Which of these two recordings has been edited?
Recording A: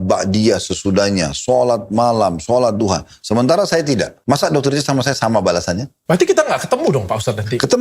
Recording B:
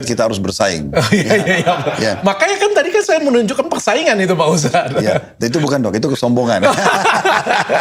A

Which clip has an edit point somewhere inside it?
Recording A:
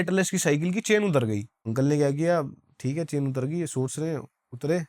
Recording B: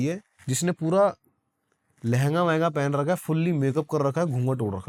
A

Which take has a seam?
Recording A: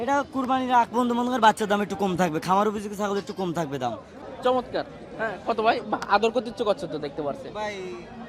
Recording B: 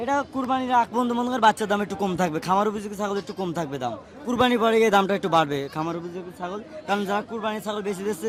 A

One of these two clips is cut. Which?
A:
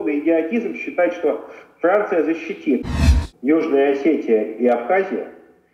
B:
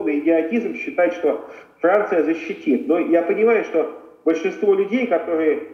A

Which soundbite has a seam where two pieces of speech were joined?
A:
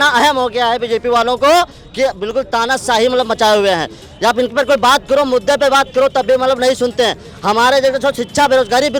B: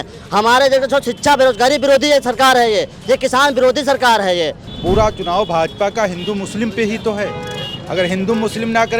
B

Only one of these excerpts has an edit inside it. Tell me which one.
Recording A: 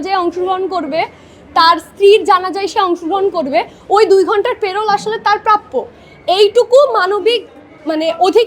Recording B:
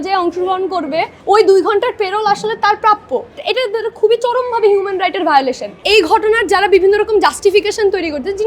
B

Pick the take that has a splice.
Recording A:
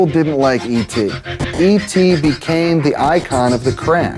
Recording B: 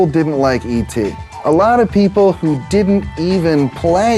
A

